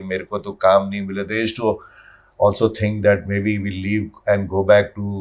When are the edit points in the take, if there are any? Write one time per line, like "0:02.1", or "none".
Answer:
none